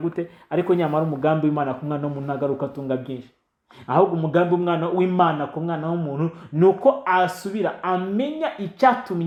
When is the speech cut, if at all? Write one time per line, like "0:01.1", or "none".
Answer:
none